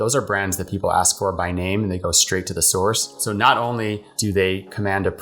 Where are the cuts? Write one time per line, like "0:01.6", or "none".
0:03.0
0:04.1